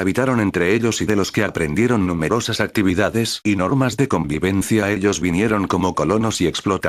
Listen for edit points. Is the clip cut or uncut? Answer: cut